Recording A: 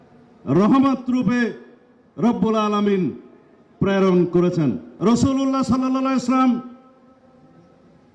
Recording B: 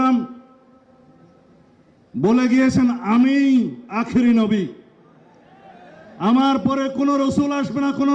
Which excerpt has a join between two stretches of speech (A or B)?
A